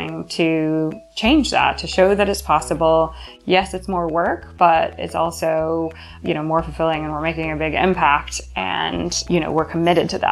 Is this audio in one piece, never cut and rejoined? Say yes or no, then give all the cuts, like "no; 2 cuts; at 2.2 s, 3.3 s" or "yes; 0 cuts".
no; 2 cuts; at 6.1 s, 9.2 s